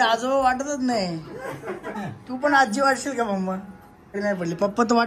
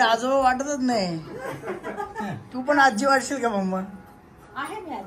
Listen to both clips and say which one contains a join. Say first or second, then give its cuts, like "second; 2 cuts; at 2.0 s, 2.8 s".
first; 2 cuts; at 1.9 s, 4.1 s